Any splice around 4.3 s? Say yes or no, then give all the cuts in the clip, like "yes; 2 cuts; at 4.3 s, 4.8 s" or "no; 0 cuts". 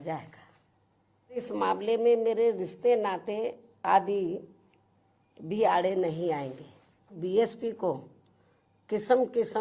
no; 2 cuts; at 1.5 s, 7.2 s